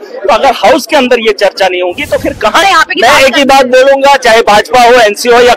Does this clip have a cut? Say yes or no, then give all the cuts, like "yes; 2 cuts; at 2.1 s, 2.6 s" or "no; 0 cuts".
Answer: yes; 1 cut; at 2.6 s